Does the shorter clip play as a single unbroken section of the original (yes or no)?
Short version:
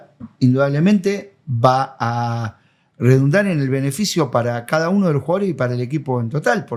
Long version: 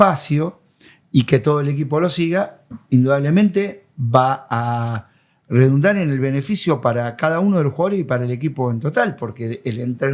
yes